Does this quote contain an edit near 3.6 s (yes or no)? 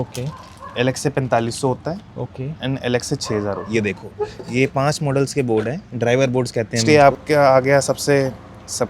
yes